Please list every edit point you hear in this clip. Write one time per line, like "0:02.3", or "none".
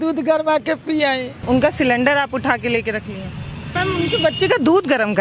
0:01.4
0:03.7